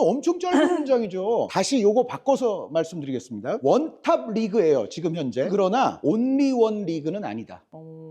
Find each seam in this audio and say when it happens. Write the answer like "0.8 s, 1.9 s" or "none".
5.5 s

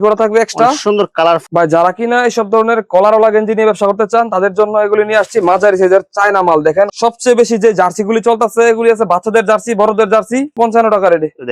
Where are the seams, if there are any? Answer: 1.4 s, 6.9 s, 10.5 s

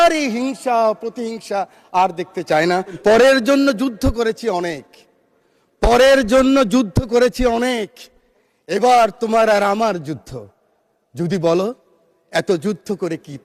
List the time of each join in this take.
3.0 s

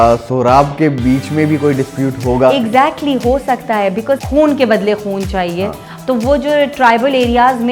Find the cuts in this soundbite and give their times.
4.2 s

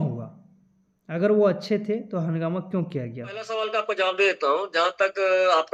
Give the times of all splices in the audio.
3.5 s

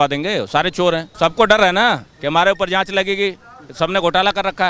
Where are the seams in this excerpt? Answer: 1.1 s

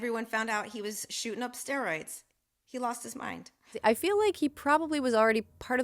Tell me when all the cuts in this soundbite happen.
3.8 s

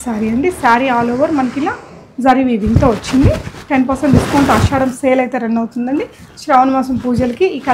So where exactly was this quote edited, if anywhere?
none

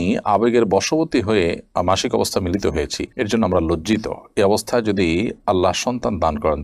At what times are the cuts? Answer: none

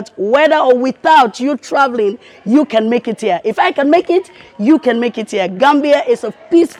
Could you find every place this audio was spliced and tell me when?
none

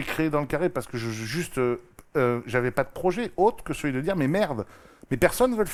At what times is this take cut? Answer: none

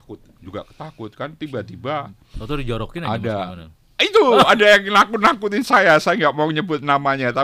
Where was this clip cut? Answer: none

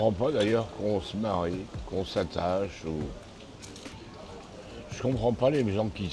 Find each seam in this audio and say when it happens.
none

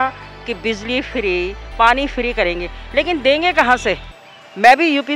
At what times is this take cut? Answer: none

